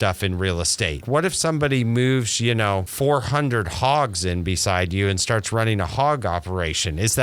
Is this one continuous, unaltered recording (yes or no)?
no